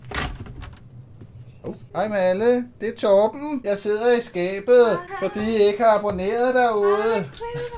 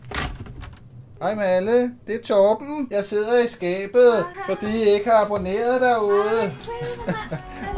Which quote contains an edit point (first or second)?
second